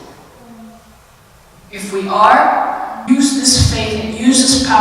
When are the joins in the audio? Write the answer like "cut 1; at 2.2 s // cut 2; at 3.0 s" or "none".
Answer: cut 1; at 3.0 s